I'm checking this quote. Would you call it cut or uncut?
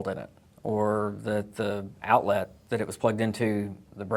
uncut